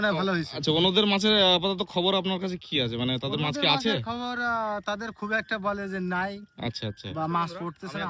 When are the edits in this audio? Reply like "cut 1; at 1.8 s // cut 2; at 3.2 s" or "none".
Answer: none